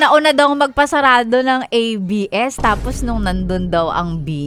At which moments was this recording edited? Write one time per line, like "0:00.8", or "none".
none